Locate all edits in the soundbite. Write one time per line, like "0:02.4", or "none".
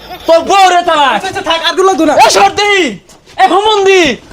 none